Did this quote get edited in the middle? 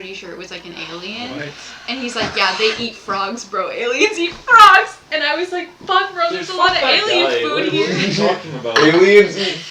no; 0 cuts

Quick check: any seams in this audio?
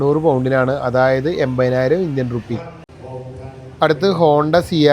no; 0 cuts

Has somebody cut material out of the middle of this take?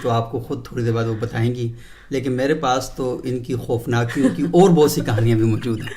no; 0 cuts

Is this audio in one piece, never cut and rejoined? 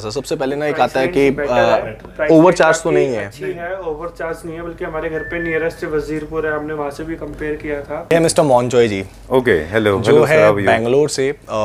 no; 1 cut; at 8.1 s

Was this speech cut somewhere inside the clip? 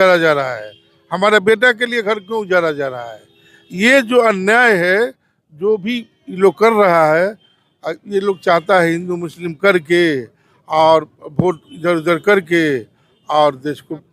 no; 0 cuts

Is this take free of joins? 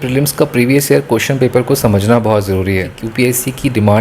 no; 1 cut; at 3.0 s

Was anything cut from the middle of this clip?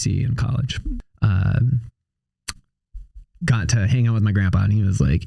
yes; 1 cut; at 1.0 s

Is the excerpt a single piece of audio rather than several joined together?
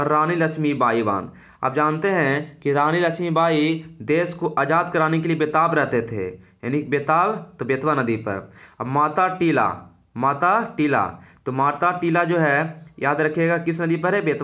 yes; 0 cuts

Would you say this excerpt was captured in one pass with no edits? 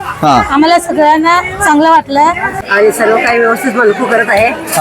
no; 1 cut; at 2.6 s

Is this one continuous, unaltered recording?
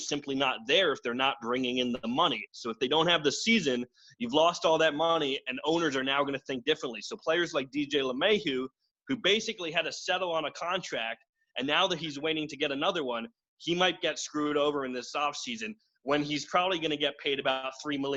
yes; 0 cuts

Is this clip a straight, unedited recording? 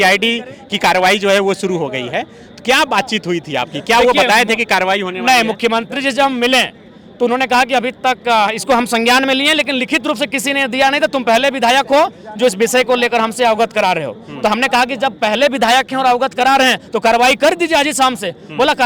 yes; 0 cuts

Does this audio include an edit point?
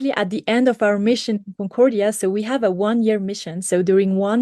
no; 0 cuts

